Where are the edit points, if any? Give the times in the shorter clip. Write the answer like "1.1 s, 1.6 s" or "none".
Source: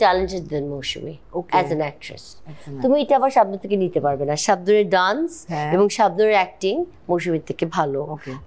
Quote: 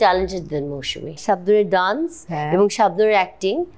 1.2 s